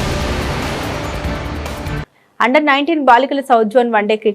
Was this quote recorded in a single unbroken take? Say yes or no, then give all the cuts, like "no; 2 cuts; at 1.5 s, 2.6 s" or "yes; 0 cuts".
no; 1 cut; at 2.1 s